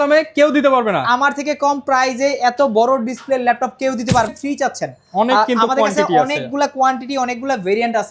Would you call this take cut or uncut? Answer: cut